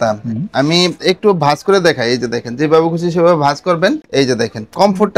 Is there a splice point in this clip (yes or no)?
no